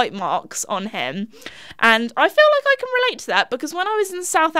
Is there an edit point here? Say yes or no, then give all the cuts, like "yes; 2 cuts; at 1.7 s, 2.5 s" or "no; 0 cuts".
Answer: no; 0 cuts